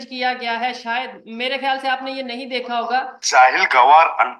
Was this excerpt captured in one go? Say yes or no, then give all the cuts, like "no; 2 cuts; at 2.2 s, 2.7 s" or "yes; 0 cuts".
no; 1 cut; at 3.2 s